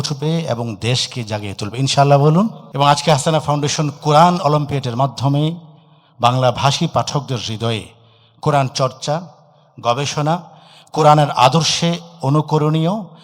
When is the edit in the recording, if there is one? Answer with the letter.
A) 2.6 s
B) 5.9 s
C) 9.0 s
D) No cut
A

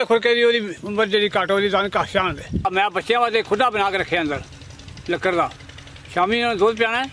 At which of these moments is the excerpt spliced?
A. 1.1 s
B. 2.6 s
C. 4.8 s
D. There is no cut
B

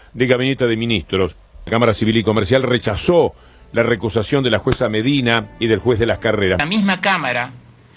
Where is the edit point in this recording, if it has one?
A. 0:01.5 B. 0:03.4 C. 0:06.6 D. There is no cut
C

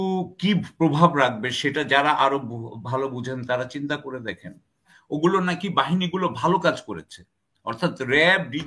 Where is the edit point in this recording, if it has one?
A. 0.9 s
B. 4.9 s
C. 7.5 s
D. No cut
B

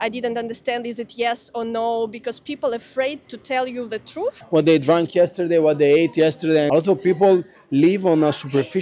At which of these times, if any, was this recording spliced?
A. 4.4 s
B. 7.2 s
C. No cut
A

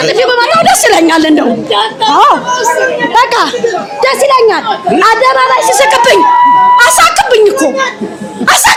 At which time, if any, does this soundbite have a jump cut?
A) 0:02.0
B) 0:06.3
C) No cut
C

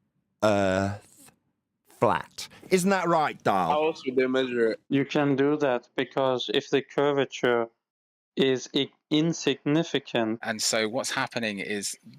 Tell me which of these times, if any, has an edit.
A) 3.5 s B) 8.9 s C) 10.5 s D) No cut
C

